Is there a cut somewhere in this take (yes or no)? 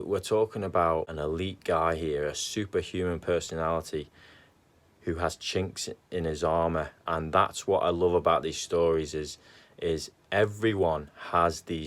yes